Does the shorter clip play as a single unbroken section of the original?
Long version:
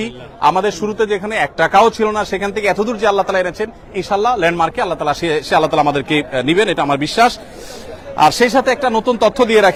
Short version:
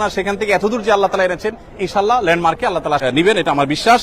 no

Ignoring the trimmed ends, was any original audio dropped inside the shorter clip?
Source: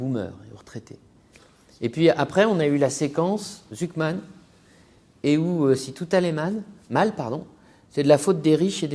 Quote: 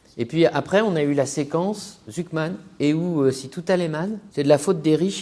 yes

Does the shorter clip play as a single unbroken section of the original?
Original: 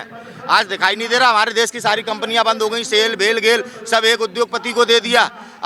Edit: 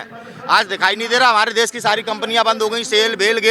yes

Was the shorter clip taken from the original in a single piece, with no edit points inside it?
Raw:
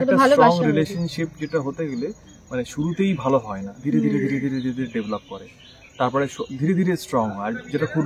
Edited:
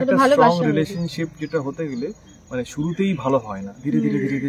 yes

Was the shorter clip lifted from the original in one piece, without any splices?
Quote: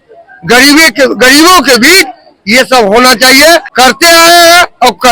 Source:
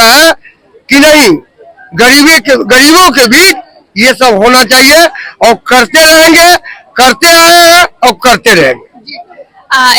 no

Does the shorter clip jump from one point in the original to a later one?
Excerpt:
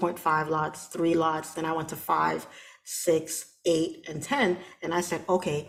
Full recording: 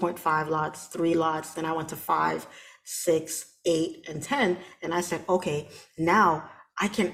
no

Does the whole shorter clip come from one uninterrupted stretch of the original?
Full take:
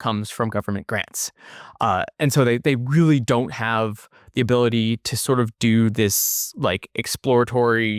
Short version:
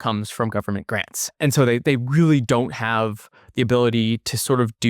no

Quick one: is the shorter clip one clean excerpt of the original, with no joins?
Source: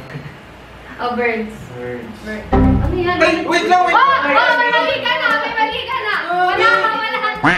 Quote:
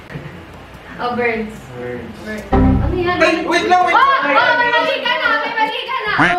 yes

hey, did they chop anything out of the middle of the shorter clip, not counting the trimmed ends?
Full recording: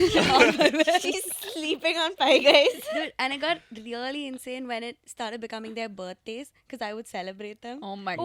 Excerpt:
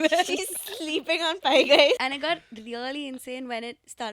yes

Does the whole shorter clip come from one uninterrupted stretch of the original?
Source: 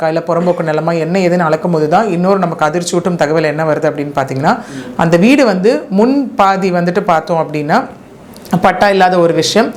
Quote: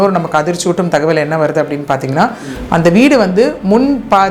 yes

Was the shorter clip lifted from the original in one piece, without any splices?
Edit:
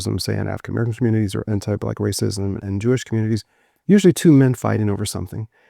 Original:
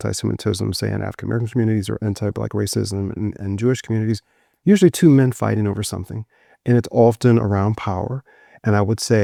no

